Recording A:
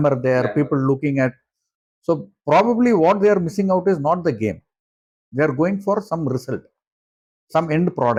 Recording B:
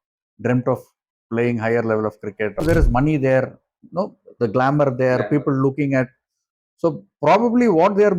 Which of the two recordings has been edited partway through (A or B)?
B